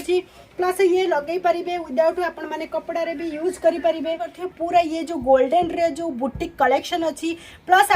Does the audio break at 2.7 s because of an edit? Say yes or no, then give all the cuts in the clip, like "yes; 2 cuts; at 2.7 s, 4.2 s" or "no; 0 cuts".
no; 1 cut; at 4.4 s